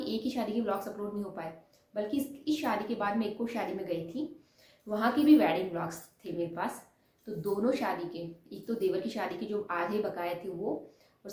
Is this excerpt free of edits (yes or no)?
yes